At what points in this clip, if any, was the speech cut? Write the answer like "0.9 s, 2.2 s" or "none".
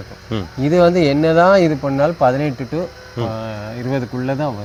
none